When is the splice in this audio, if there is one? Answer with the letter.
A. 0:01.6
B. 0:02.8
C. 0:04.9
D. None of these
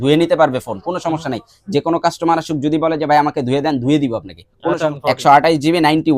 C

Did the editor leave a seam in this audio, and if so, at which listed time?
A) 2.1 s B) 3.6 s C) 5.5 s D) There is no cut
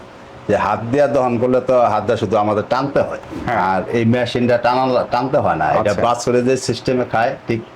B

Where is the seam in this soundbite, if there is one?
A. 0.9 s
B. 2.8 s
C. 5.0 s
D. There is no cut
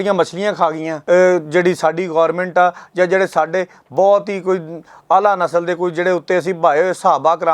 A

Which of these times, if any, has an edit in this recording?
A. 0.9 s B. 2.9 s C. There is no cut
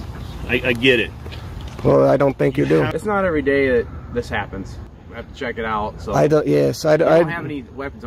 B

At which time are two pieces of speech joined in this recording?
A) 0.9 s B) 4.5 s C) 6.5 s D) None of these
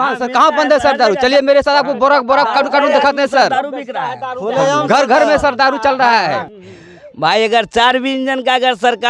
C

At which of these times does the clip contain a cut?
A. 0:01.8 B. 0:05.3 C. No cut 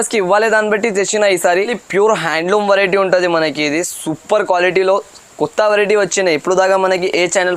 A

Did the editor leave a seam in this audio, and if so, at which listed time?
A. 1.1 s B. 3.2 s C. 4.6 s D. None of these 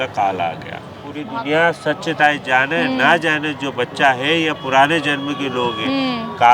A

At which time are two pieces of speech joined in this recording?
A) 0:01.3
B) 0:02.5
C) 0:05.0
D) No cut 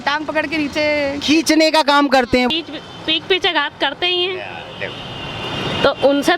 B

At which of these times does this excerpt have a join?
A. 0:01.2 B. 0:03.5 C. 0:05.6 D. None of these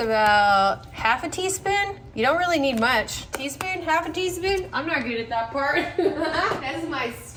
D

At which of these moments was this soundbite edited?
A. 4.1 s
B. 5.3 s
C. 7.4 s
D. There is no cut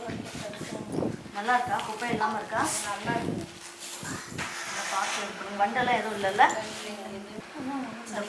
C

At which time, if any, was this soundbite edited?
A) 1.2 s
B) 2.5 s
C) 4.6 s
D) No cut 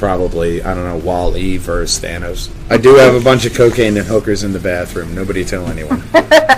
B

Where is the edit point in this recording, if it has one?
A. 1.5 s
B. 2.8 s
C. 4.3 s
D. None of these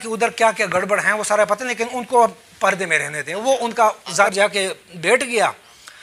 C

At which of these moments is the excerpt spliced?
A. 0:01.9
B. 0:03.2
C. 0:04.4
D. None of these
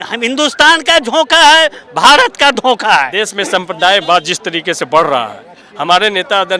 B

